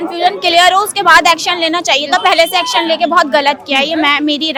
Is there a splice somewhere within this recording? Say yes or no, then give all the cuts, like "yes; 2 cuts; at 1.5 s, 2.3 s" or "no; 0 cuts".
no; 0 cuts